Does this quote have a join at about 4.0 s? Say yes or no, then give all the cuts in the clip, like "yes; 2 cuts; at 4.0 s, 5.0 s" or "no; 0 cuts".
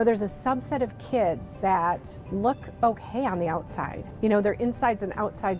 yes; 2 cuts; at 2.1 s, 4.0 s